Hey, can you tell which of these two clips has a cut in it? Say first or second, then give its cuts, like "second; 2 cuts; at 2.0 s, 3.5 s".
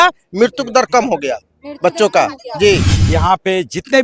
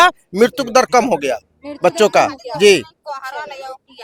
first; 1 cut; at 3.0 s